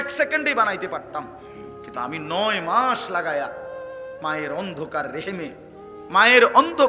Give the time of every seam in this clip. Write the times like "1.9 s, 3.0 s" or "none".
none